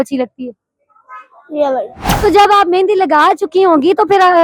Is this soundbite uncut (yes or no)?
no